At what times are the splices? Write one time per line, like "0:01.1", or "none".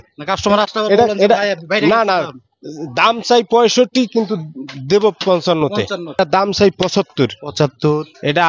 0:06.2